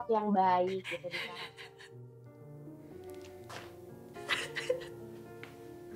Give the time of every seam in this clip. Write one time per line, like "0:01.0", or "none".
none